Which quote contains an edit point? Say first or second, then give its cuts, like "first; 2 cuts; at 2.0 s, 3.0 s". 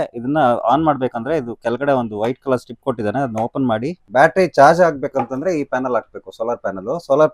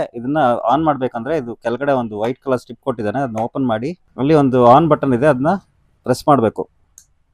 first; 1 cut; at 4.0 s